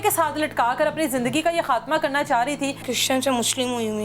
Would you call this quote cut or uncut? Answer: cut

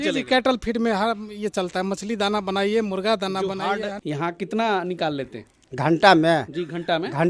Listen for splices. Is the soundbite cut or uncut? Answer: cut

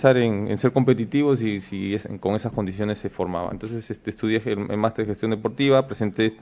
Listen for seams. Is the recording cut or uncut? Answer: uncut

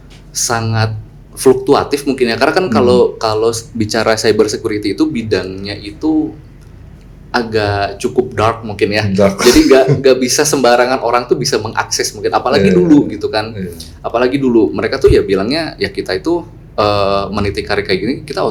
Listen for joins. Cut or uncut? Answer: uncut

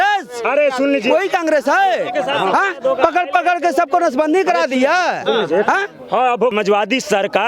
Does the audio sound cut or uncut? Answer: cut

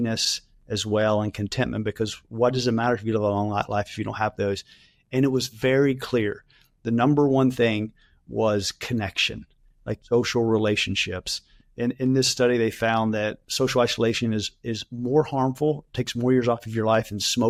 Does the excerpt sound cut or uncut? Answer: uncut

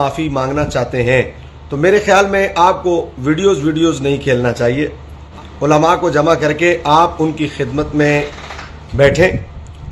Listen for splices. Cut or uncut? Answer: cut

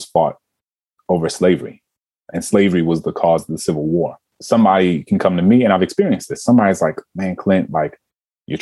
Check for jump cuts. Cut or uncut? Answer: uncut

